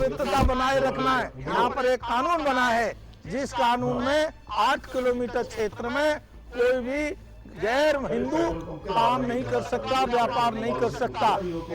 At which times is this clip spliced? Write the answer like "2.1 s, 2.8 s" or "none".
1.4 s